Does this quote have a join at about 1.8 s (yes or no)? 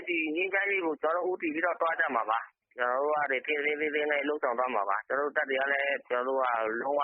no